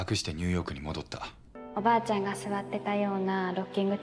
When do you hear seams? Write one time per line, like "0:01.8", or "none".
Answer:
0:01.6